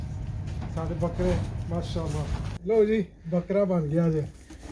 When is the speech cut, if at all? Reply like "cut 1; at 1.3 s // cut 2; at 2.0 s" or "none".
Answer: cut 1; at 2.5 s